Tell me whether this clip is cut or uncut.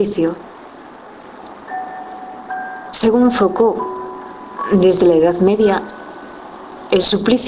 cut